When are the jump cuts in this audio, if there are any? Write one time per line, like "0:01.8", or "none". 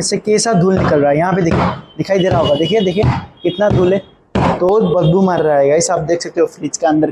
0:04.7